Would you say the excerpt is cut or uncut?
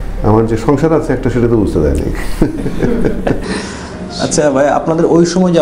uncut